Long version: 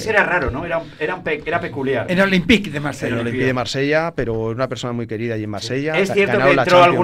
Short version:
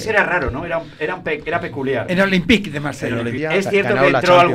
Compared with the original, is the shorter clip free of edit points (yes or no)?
no